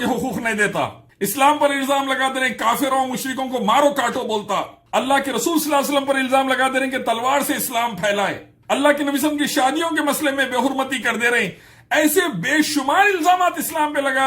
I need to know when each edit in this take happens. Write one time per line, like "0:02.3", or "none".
0:01.0
0:04.8
0:08.5

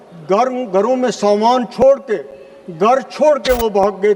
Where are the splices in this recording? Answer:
none

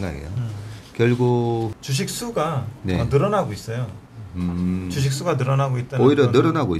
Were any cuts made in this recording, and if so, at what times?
0:01.8

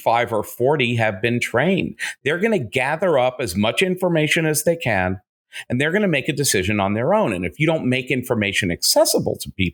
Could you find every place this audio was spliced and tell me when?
none

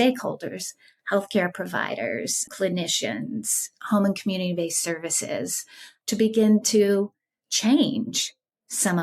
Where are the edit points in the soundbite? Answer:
0:02.5
0:05.7

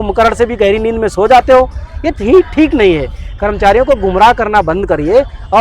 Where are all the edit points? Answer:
none

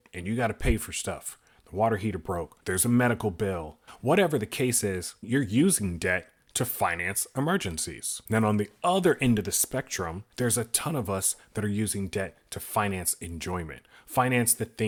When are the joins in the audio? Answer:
none

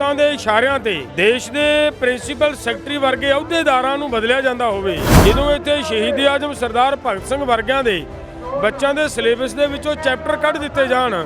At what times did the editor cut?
0:01.1
0:05.1

